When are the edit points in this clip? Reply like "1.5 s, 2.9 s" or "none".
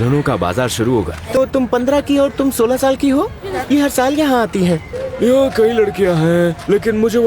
1.4 s, 3.5 s, 5.0 s

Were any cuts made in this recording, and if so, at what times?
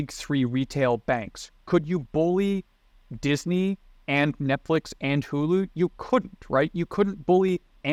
none

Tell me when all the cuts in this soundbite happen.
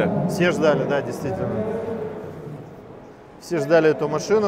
none

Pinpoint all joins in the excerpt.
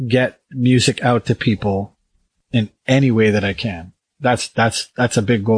2.4 s

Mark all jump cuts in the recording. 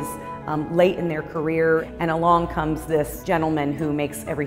1.9 s, 3.2 s

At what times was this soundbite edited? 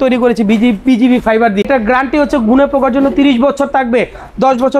1.7 s

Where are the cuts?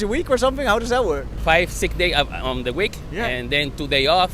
none

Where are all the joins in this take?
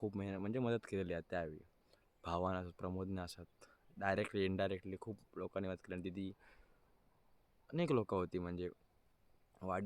none

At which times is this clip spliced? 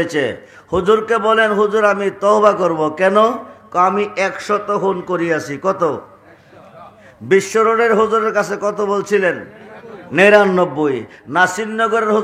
none

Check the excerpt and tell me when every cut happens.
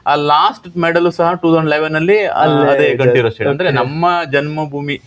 none

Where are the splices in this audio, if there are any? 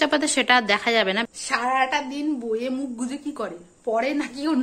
1.2 s

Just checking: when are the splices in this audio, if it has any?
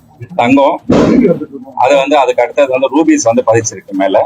none

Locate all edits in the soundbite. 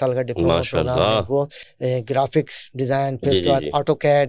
1.6 s

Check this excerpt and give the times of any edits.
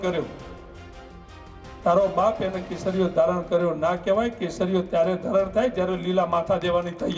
none

